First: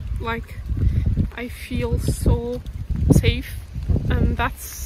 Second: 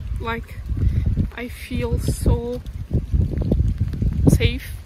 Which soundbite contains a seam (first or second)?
first